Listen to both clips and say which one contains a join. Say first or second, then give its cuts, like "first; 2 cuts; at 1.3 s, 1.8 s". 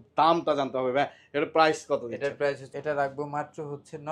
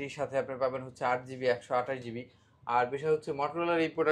first; 1 cut; at 2.6 s